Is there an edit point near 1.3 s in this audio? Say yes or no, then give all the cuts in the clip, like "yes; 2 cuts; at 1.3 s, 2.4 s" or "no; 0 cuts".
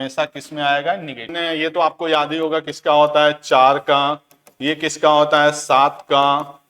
yes; 1 cut; at 1.3 s